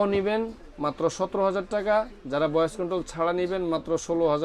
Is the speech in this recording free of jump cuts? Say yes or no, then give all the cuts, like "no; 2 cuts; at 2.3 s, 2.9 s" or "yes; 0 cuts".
yes; 0 cuts